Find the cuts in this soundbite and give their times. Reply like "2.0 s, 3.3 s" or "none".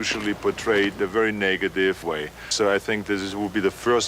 2.5 s